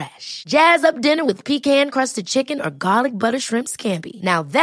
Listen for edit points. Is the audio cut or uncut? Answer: uncut